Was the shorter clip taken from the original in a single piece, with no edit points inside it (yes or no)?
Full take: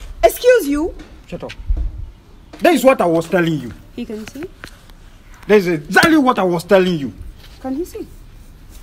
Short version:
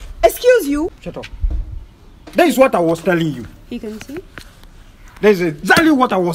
no